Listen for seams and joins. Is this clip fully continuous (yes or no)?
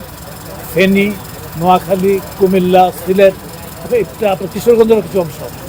yes